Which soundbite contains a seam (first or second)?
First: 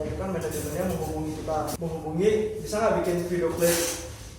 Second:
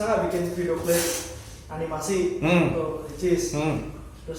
first